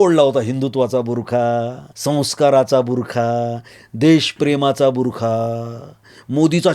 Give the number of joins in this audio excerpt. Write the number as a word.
one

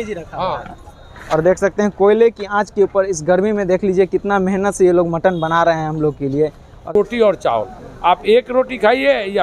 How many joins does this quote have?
two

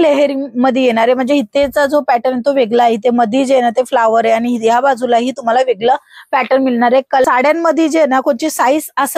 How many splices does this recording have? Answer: one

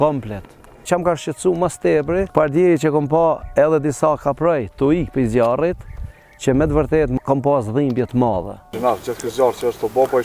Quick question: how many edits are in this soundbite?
four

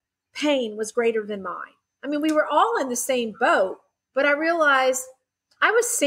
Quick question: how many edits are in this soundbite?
zero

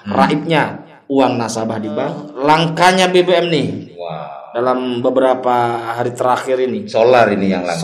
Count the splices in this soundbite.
one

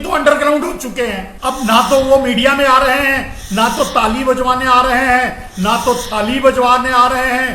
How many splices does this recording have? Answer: one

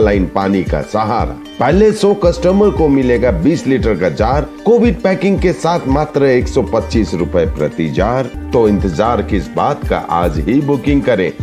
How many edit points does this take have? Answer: one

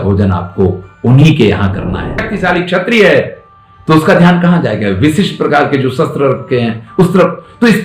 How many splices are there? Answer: one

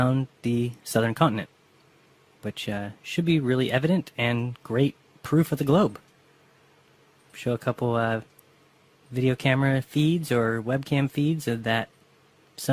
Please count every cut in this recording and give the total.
one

